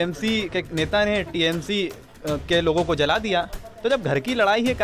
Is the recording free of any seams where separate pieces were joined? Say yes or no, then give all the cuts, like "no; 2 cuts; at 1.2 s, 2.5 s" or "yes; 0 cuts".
yes; 0 cuts